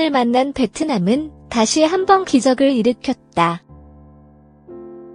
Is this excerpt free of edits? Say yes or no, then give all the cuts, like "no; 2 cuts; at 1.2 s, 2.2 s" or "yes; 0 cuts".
no; 1 cut; at 3.7 s